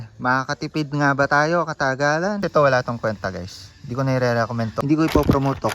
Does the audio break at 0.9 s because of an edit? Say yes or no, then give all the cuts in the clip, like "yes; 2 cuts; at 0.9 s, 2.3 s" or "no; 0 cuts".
no; 2 cuts; at 2.4 s, 4.7 s